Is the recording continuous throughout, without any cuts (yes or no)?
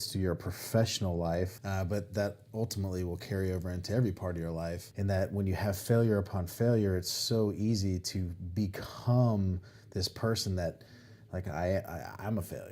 no